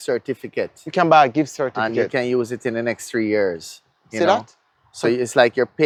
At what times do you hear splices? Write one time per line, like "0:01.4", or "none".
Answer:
none